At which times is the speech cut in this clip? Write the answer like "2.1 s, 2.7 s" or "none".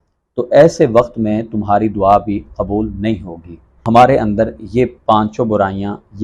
3.8 s